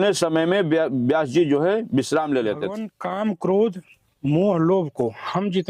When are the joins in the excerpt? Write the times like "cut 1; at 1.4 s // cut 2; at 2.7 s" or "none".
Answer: cut 1; at 3.0 s